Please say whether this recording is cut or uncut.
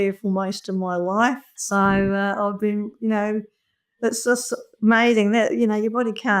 uncut